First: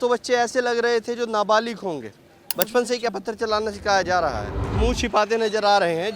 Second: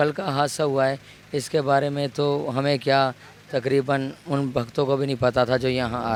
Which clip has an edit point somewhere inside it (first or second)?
first